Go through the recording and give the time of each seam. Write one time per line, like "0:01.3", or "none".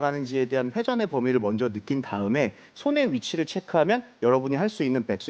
0:02.7